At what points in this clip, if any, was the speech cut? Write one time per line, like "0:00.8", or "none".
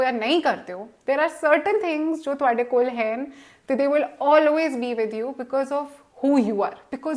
none